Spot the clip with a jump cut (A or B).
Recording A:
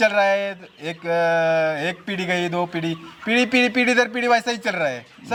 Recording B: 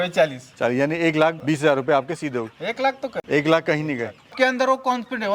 B